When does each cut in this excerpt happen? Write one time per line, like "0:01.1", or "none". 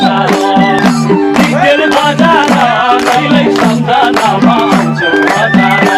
none